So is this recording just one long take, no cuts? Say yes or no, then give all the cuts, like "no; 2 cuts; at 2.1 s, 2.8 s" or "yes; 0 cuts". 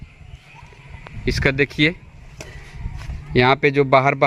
yes; 0 cuts